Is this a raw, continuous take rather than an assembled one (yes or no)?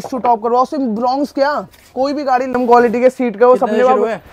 no